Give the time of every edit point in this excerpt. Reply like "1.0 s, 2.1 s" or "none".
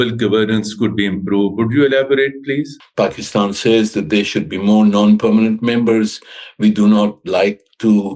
2.8 s